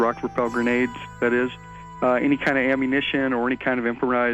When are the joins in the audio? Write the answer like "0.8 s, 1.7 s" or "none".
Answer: 3.4 s